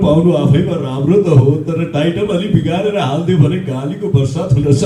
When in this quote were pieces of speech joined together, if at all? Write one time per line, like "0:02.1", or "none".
none